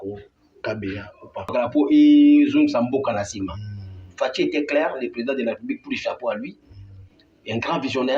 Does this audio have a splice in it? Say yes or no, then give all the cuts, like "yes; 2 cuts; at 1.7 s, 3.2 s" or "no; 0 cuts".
yes; 1 cut; at 1.5 s